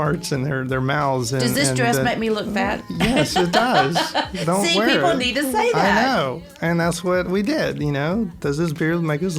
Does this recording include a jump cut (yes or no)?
no